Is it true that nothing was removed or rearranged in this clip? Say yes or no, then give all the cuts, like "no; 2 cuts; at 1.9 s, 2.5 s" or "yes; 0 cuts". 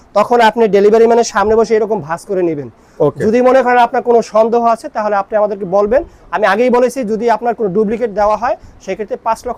yes; 0 cuts